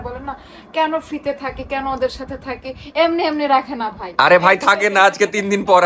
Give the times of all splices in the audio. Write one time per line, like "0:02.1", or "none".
none